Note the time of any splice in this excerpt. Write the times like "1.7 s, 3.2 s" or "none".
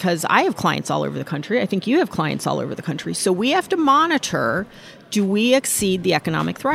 none